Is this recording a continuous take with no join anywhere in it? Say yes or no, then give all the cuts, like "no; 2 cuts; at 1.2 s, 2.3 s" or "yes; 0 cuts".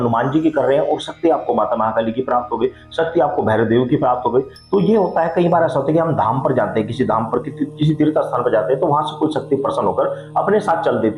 yes; 0 cuts